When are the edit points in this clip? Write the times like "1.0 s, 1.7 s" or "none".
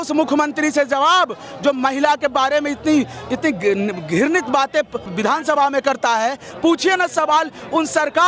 5.1 s, 6.5 s

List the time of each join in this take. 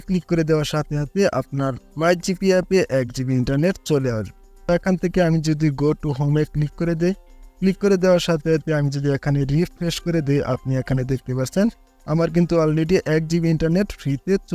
none

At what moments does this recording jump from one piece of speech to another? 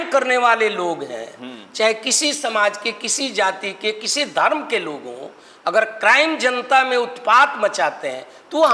none

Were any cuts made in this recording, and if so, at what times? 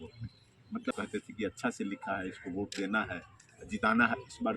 0.9 s

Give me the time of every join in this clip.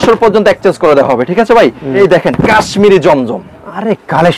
2.0 s

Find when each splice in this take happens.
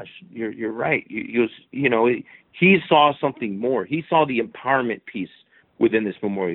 none

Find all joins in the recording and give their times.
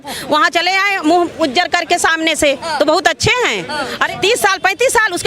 4.1 s

